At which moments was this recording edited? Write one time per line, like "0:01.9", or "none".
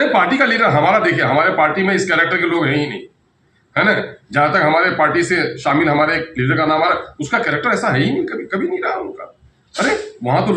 none